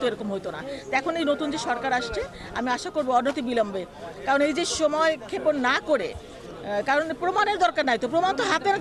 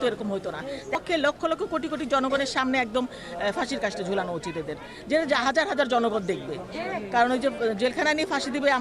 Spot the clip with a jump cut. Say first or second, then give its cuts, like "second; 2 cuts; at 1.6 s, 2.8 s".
second; 1 cut; at 1.0 s